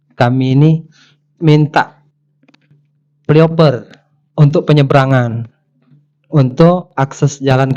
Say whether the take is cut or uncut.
uncut